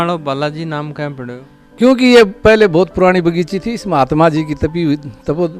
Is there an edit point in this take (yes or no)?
no